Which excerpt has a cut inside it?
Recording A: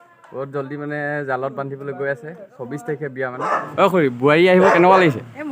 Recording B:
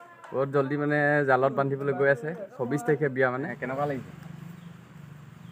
A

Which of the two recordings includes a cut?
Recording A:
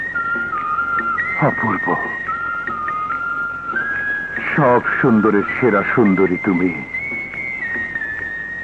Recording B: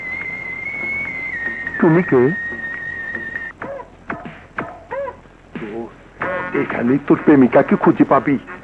B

